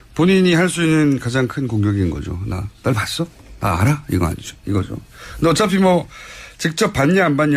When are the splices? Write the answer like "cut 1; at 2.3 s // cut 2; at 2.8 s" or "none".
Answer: cut 1; at 5.9 s